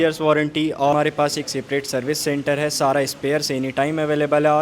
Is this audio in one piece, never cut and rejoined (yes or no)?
no